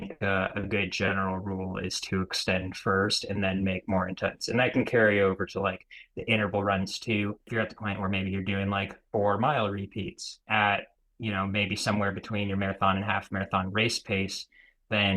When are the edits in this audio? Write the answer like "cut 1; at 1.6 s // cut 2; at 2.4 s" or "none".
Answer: cut 1; at 7.4 s // cut 2; at 10.4 s

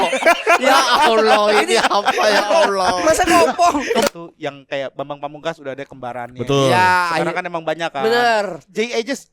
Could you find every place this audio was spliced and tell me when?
cut 1; at 4.1 s

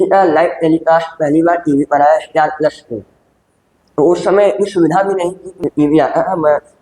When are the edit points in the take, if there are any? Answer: cut 1; at 5.5 s

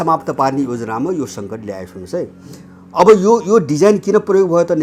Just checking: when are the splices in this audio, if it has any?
none

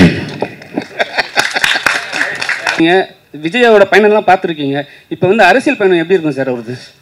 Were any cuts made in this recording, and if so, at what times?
cut 1; at 2.8 s

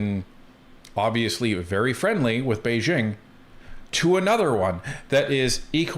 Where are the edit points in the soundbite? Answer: none

